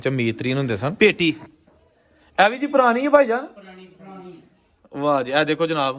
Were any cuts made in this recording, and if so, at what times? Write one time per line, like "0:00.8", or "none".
0:00.9